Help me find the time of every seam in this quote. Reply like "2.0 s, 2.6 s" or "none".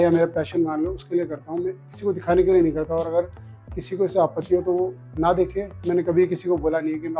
none